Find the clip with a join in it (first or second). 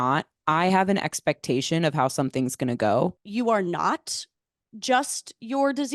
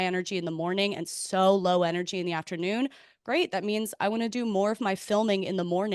first